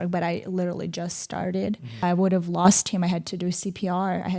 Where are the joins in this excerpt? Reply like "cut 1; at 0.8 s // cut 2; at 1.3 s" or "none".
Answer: cut 1; at 2.0 s